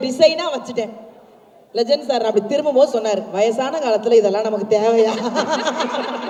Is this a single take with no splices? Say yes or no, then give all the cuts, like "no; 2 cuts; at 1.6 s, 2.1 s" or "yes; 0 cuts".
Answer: yes; 0 cuts